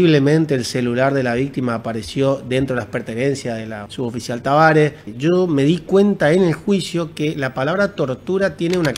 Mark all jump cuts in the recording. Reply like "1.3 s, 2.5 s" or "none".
3.8 s, 5.1 s